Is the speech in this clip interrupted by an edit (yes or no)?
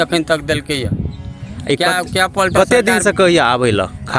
no